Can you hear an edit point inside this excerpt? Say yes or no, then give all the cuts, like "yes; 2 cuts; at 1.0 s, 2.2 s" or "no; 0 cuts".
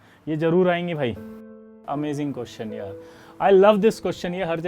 yes; 1 cut; at 1.5 s